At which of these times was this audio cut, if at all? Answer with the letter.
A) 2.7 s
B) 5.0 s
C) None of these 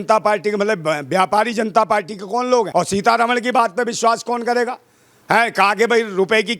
A